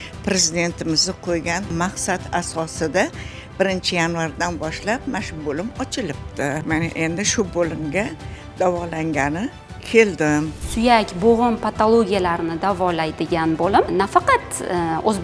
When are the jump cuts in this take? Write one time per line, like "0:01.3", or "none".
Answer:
0:01.7
0:05.1
0:10.6
0:13.9